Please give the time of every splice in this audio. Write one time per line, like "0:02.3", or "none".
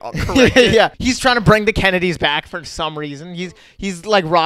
0:01.0